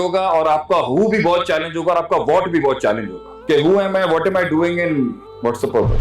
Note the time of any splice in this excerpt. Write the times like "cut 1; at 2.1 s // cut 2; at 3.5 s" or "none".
none

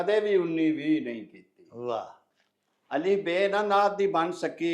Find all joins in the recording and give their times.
cut 1; at 2.2 s

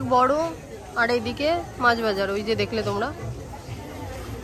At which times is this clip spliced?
none

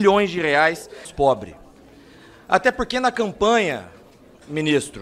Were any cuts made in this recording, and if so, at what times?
cut 1; at 1.1 s

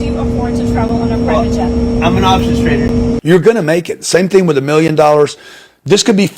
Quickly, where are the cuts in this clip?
cut 1; at 3.2 s

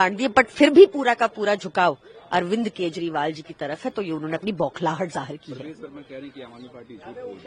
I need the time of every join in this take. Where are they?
none

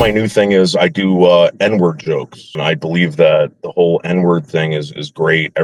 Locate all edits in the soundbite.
cut 1; at 2.6 s

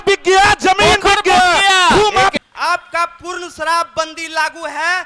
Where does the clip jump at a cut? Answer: cut 1; at 2.3 s

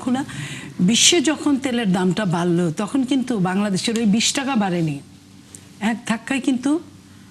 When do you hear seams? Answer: none

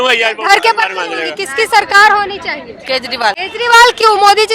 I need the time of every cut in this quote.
cut 1; at 1.4 s // cut 2; at 3.5 s

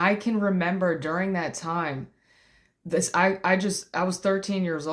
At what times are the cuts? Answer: none

